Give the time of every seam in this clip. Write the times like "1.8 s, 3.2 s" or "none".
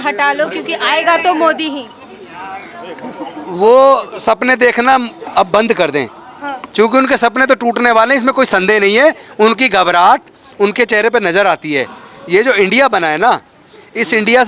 none